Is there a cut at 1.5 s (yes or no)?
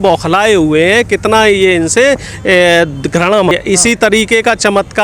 no